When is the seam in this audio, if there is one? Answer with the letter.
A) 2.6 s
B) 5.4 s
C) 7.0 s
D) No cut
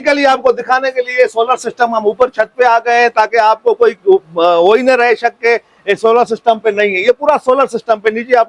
D